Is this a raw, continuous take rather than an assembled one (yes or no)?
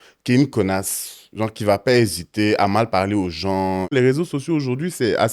no